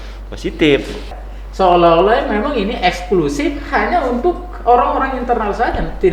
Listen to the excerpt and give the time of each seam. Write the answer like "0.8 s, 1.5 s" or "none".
1.1 s